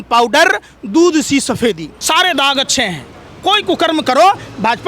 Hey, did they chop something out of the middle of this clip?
yes; 1 cut; at 1.9 s

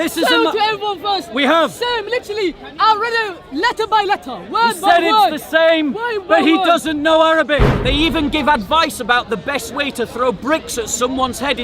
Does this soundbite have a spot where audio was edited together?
yes; 1 cut; at 7.8 s

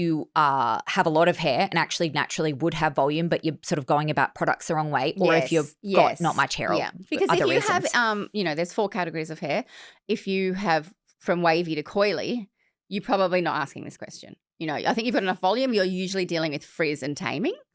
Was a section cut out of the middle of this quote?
no; 0 cuts

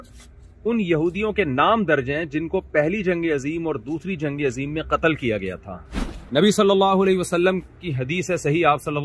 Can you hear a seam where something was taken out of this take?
yes; 1 cut; at 6.1 s

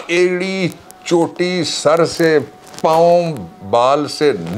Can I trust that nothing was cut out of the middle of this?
yes; 0 cuts

